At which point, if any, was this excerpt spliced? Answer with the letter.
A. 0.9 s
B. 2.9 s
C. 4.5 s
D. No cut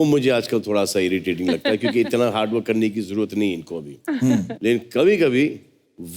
D